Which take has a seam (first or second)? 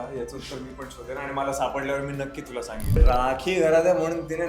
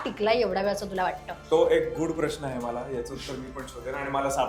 first